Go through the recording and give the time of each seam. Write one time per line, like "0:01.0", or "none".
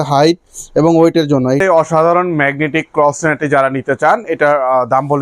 0:01.6